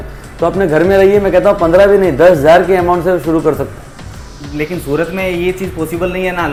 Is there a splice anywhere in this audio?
no; 0 cuts

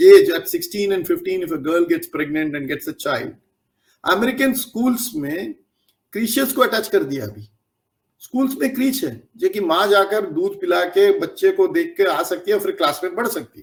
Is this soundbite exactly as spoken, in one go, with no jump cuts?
yes; 0 cuts

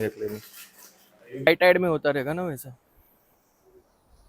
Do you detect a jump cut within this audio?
yes; 1 cut; at 1.4 s

